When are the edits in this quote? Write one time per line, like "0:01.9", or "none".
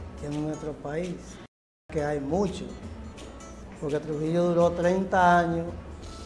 0:04.5